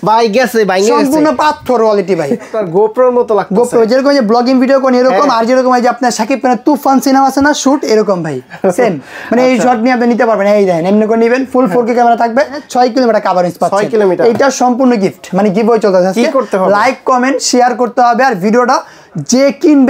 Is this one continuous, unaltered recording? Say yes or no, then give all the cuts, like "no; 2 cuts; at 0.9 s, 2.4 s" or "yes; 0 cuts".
no; 2 cuts; at 2.5 s, 12.6 s